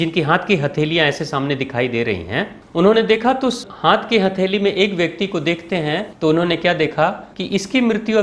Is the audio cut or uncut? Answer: cut